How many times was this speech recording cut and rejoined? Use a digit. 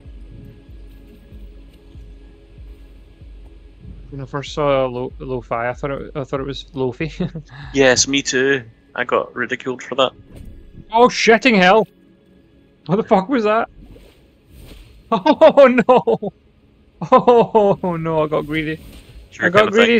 1